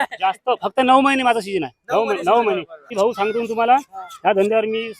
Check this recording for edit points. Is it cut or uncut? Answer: cut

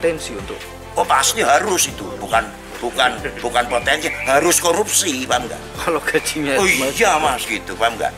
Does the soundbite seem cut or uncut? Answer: uncut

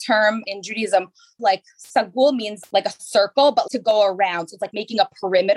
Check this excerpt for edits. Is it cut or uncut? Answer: cut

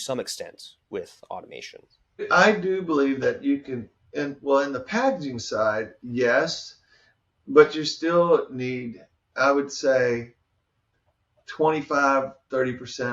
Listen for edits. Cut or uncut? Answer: cut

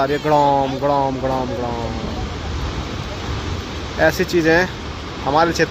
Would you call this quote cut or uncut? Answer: uncut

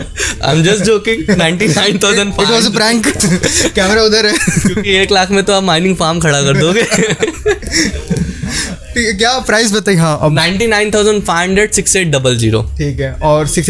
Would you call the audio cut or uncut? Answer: uncut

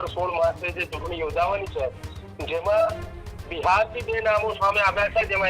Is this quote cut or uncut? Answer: uncut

